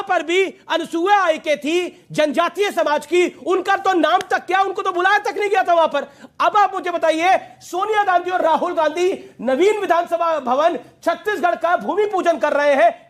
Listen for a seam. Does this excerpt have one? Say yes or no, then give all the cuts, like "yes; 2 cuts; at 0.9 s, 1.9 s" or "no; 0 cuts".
no; 0 cuts